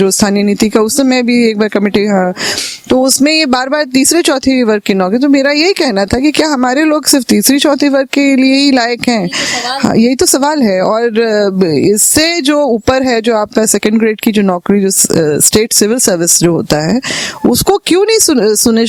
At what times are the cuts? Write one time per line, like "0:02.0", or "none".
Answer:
none